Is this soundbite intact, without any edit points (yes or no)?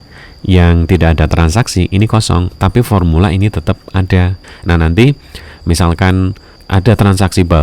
no